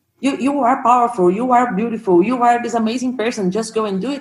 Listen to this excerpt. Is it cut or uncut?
uncut